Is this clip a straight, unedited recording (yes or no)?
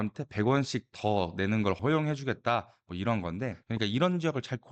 no